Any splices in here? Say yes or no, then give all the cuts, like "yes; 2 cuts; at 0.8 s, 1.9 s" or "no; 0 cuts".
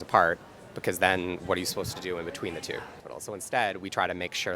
yes; 1 cut; at 3.1 s